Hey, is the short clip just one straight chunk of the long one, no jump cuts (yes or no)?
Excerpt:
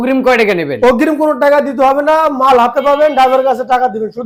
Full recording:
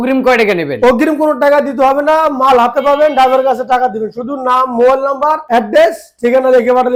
yes